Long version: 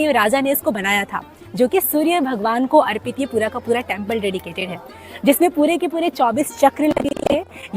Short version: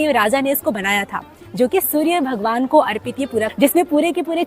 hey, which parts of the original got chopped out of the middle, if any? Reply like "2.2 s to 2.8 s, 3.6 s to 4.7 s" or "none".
3.5 s to 5.2 s